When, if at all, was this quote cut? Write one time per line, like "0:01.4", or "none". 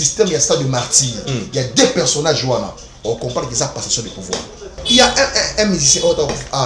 0:04.8

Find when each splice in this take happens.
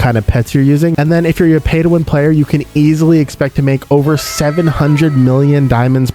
0:00.9

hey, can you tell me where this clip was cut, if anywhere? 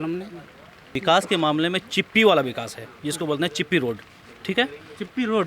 0:00.9

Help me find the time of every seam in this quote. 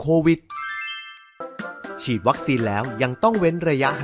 0:01.2

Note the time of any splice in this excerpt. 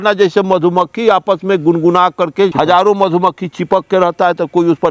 0:02.5

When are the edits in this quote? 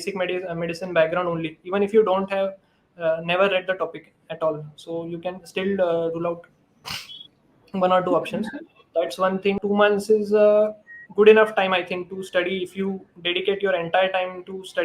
0:09.6

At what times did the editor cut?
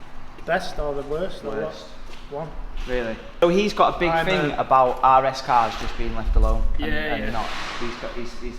none

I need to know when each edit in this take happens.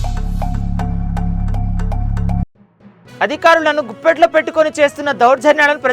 0:02.1

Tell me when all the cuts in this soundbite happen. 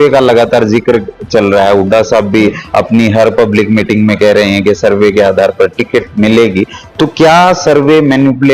none

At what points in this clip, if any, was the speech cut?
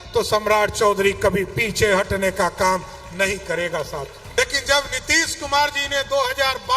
0:04.2

